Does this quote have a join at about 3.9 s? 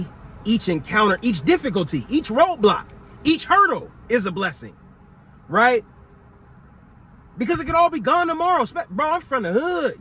no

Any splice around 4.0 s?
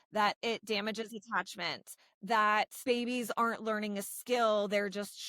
no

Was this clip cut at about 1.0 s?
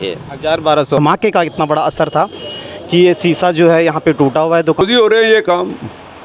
yes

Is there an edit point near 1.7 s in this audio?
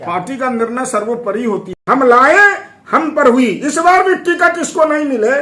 yes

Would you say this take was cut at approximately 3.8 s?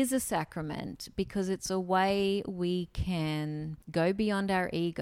yes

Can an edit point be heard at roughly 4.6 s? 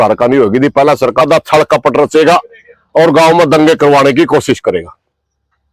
no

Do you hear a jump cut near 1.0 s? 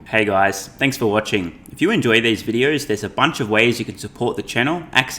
no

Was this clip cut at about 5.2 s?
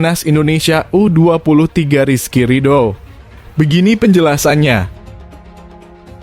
yes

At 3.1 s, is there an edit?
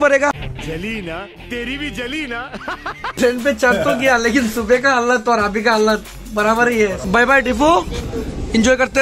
yes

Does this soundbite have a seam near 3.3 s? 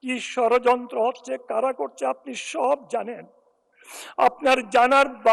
no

